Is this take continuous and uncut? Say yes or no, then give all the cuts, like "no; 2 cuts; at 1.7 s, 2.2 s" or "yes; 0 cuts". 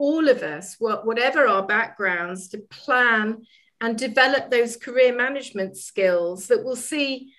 yes; 0 cuts